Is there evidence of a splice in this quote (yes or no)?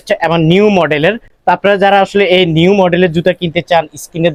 no